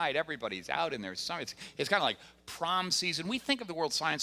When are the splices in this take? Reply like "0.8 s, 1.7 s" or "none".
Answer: 2.4 s

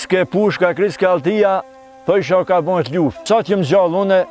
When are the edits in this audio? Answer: 3.2 s

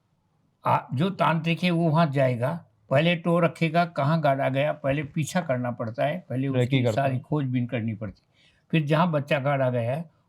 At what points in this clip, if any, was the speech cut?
none

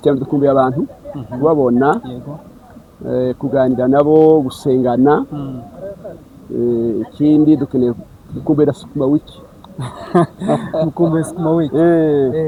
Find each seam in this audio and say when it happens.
none

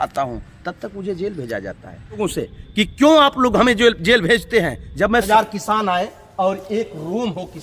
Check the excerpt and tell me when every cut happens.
2.2 s, 5.3 s

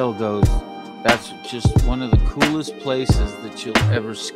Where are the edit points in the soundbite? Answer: none

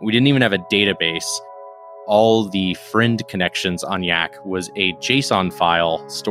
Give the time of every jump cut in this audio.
2.0 s

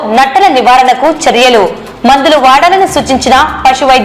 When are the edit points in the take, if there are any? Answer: none

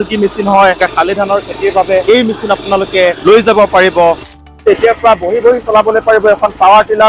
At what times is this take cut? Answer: 0.8 s, 2.0 s, 3.2 s, 4.5 s

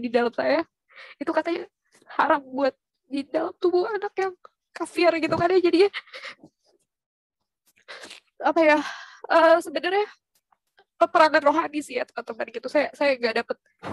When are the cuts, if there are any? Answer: none

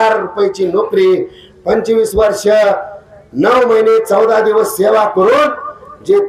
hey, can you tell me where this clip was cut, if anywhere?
none

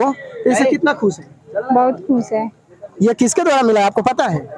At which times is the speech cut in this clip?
none

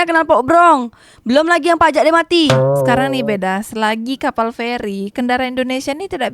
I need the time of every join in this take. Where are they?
2.7 s

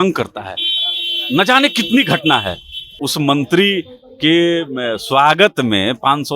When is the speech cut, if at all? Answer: 3.0 s

